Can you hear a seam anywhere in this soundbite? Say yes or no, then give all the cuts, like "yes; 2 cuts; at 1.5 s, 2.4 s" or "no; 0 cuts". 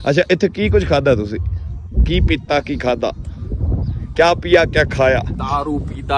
no; 0 cuts